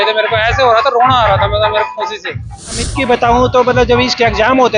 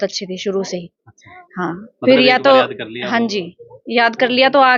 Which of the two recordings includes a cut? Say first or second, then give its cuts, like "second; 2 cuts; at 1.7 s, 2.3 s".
first; 1 cut; at 2.8 s